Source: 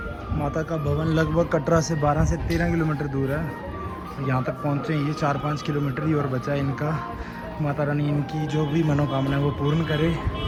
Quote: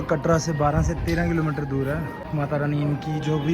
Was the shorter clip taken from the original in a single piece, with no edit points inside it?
no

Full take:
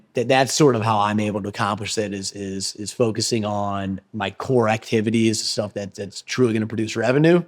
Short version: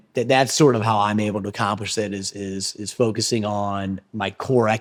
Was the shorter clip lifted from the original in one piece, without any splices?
yes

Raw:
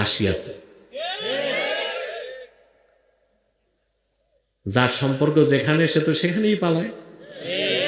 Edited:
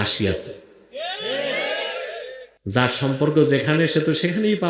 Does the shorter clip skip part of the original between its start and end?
yes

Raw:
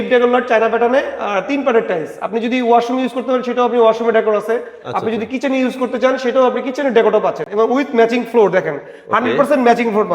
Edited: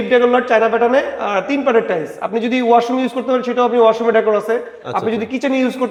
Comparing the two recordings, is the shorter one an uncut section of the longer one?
yes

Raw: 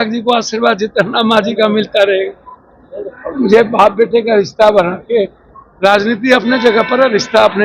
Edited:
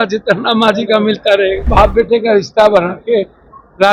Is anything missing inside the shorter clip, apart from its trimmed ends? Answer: yes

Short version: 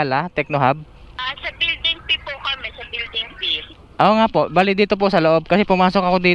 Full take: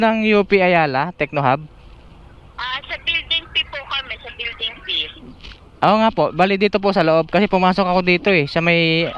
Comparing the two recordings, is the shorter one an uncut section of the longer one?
no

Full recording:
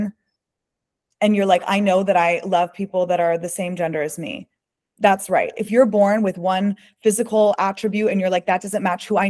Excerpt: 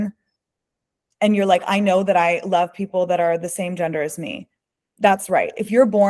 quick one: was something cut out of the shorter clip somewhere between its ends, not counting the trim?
no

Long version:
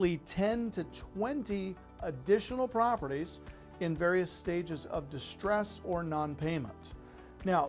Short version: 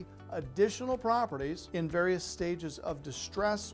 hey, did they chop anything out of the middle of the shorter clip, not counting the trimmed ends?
yes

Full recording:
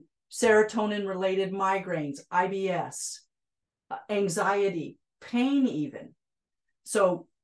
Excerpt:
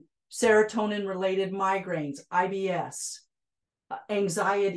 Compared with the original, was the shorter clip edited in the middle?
no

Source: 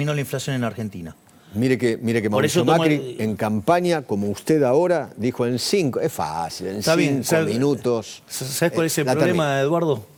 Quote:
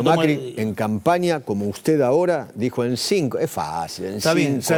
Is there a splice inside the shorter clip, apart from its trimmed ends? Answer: no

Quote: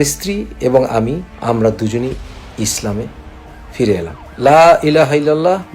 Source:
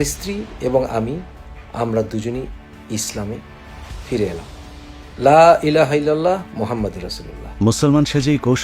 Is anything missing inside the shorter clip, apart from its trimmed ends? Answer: yes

